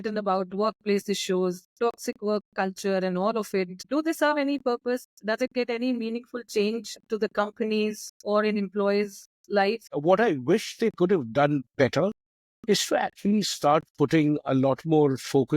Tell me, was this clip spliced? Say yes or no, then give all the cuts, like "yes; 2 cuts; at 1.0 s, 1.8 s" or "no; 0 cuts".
yes; 2 cuts; at 3.8 s, 9.9 s